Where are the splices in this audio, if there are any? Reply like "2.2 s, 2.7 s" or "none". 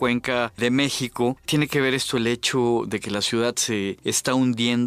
none